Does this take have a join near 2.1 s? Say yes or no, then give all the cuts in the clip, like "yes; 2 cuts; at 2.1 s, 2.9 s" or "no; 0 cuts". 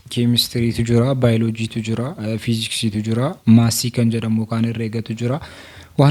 no; 0 cuts